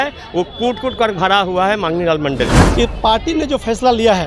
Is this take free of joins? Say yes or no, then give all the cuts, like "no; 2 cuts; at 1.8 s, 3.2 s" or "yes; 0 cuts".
no; 1 cut; at 2.6 s